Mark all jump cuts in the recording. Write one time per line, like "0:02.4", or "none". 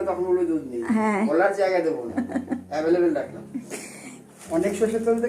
0:01.3
0:04.3